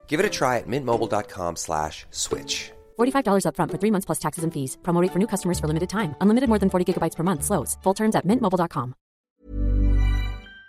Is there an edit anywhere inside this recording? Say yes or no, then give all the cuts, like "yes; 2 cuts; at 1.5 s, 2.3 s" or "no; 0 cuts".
yes; 1 cut; at 9.2 s